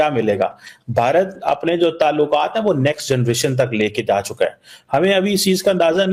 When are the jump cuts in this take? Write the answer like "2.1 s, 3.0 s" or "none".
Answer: none